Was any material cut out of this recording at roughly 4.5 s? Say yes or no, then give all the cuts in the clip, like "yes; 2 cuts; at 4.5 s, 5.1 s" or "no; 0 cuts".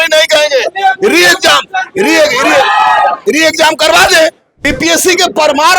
yes; 1 cut; at 4.5 s